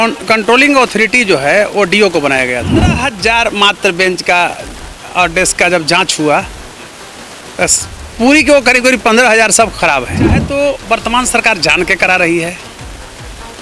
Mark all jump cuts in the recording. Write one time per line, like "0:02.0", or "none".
0:03.1
0:10.4

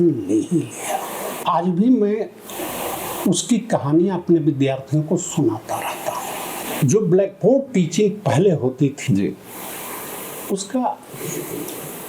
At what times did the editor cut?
0:01.4
0:06.6

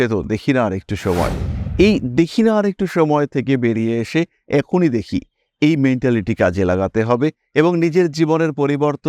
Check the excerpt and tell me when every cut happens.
none

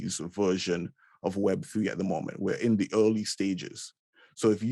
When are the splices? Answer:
none

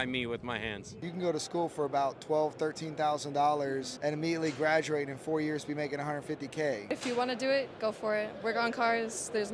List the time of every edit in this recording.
0:01.0
0:03.9
0:06.8

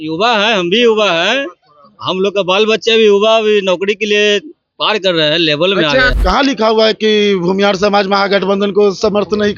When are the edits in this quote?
0:06.1

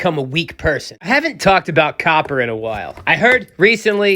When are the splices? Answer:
0:00.9

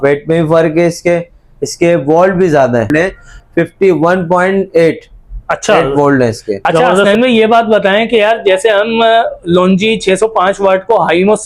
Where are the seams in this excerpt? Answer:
0:02.9
0:06.9

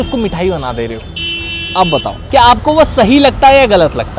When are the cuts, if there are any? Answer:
0:02.2

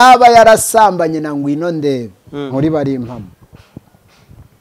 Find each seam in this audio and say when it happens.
0:02.5

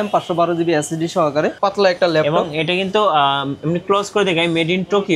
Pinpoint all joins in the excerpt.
0:01.5

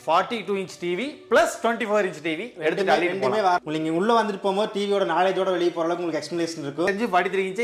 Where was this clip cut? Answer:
0:03.6
0:06.9

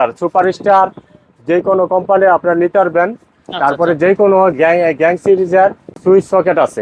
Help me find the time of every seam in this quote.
0:05.9

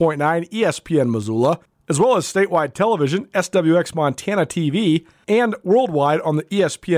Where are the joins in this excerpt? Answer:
0:01.7
0:05.1

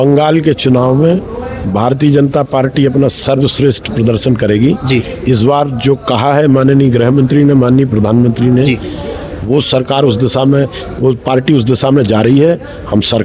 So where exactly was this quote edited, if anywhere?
none

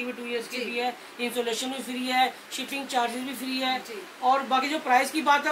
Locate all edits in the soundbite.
none

